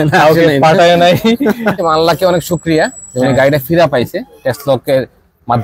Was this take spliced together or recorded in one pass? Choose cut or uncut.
cut